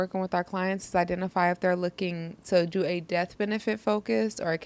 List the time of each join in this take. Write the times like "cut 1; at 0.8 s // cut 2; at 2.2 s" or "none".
none